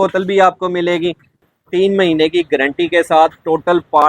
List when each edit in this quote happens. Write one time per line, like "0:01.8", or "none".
0:01.4